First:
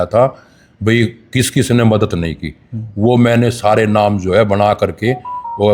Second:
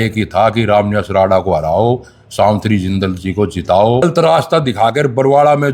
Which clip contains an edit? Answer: second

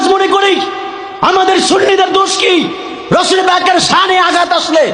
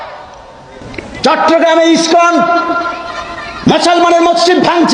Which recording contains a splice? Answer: second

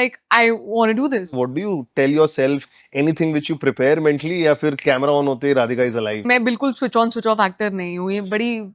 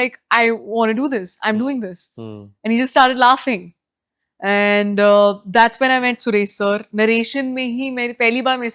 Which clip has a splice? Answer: first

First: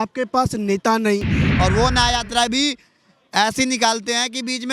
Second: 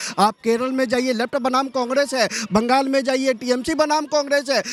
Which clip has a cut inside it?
first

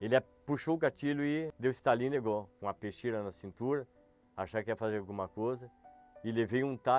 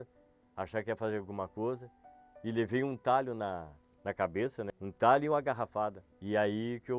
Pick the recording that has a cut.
first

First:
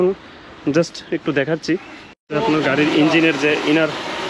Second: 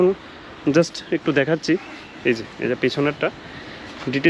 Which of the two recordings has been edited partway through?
first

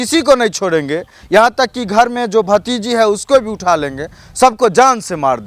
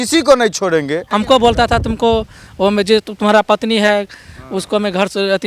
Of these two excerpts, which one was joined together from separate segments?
second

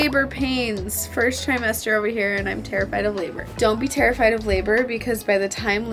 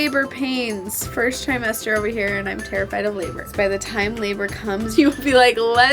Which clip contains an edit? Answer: second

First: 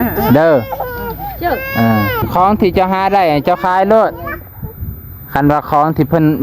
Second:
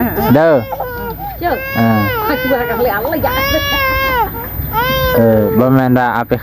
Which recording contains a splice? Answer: first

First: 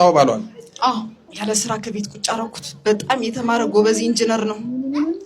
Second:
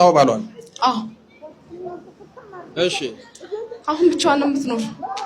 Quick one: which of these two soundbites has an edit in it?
first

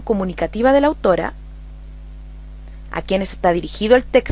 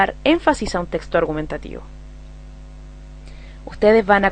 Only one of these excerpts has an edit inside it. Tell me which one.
first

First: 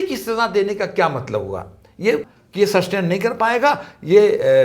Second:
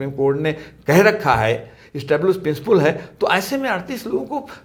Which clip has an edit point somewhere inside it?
first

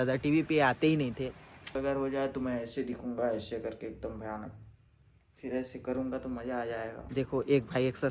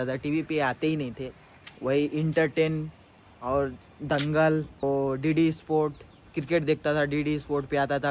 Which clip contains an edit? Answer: first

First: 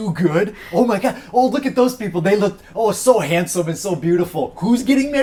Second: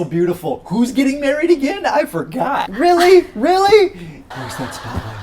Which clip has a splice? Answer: second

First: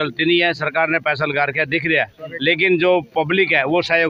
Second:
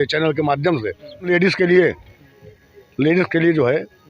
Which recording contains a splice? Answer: second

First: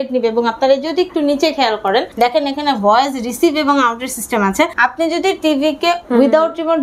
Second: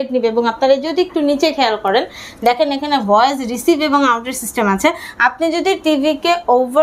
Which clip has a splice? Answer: first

